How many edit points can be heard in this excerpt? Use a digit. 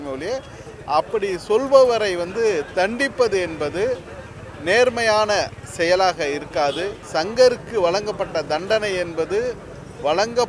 1